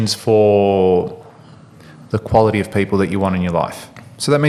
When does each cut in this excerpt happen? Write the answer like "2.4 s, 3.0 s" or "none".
none

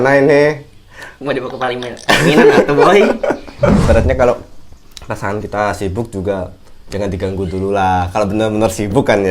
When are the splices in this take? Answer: 3.8 s

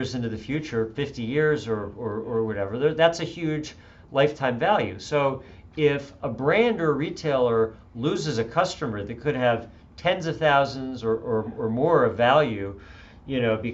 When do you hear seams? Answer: none

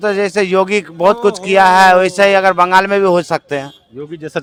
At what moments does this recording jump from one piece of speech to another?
none

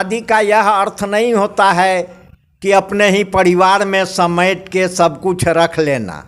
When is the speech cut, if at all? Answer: none

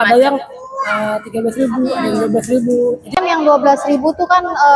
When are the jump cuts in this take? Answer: 3.2 s

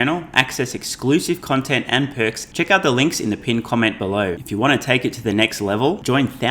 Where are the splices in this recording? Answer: 2.4 s, 4.4 s

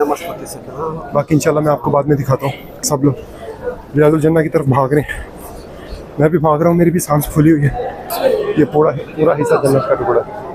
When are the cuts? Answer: 2.9 s, 8.2 s

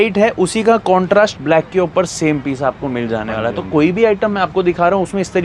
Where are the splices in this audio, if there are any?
none

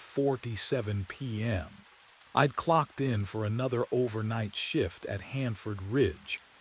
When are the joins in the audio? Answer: 3.4 s

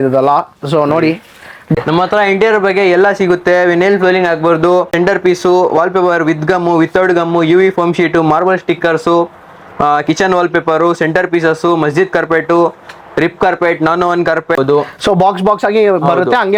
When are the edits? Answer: 1.7 s, 4.9 s, 14.6 s

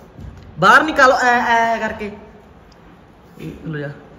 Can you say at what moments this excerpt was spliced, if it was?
none

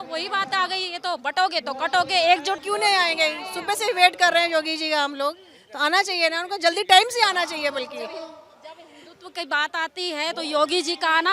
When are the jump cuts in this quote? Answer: none

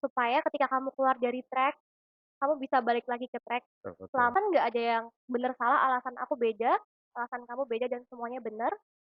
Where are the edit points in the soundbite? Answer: 4.3 s

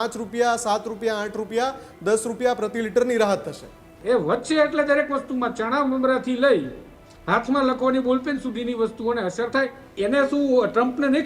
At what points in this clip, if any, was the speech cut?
3.9 s, 9.9 s

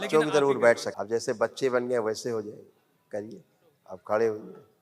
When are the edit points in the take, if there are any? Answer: 0.9 s

